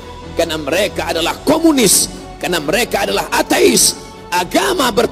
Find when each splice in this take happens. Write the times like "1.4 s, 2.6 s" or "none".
4.1 s